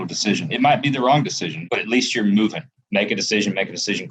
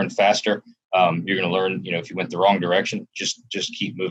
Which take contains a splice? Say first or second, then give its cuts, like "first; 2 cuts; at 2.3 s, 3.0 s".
first; 2 cuts; at 1.6 s, 2.8 s